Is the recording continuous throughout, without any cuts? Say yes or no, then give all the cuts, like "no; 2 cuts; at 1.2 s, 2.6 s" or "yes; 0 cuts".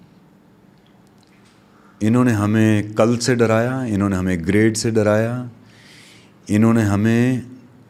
yes; 0 cuts